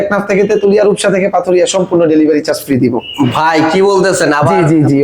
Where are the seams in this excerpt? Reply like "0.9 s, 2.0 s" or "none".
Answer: none

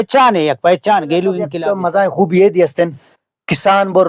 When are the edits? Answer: 1.6 s

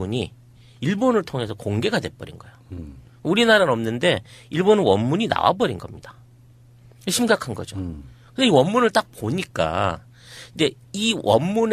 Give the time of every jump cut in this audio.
4.7 s

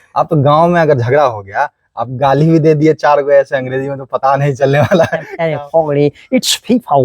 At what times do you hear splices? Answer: 5.3 s

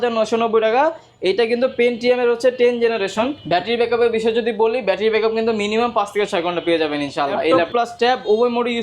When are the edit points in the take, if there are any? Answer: 3.4 s, 7.6 s

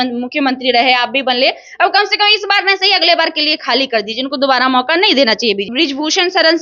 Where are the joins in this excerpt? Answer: 5.7 s

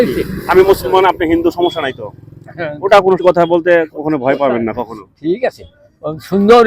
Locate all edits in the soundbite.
3.2 s

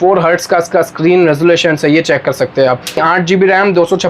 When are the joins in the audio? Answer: 3.0 s

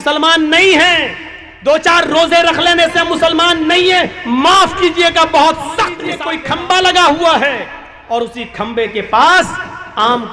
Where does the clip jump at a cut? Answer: 6.3 s

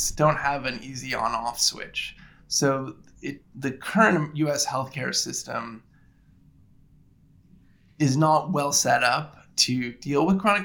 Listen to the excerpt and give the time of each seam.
none

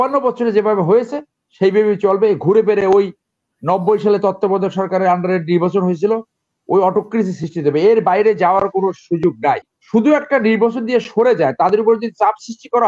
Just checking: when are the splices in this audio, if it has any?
9.8 s

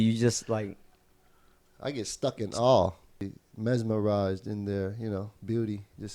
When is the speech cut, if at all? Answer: 3.2 s

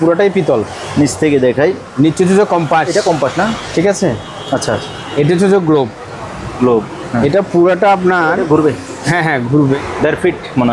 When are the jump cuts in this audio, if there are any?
9.8 s

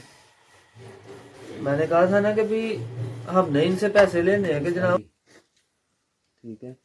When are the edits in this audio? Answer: 5.0 s

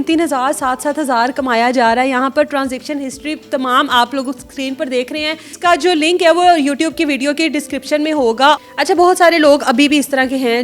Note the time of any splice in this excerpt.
5.5 s, 8.6 s

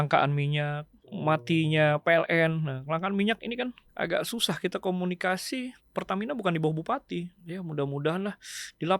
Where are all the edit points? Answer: 1.2 s, 3.8 s, 5.8 s, 7.4 s

